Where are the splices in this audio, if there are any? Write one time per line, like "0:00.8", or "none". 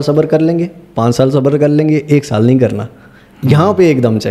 none